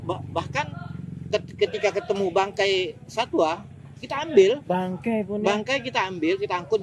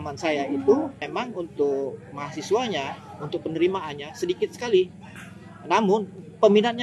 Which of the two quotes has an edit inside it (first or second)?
second